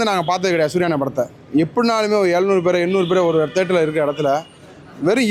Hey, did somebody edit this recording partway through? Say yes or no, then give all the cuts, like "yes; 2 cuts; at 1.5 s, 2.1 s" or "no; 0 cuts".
no; 0 cuts